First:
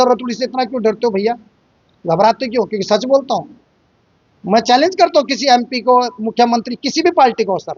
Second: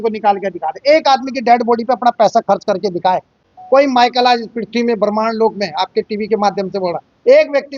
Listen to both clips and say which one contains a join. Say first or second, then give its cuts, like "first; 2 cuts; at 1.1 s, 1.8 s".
second; 1 cut; at 3.3 s